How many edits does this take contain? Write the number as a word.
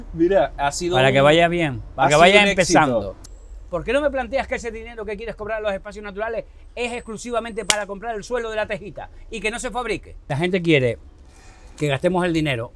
two